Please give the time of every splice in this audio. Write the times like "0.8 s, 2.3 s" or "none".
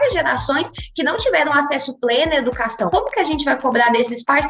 2.9 s